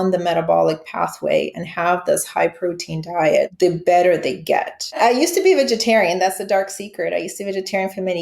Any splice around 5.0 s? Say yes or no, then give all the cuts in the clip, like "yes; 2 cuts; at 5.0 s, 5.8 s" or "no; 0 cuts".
yes; 2 cuts; at 3.5 s, 5.0 s